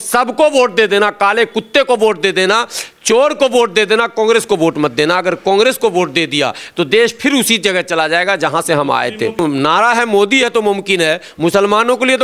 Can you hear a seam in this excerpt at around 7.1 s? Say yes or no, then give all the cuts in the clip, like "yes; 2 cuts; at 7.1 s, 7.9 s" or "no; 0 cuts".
no; 1 cut; at 9.4 s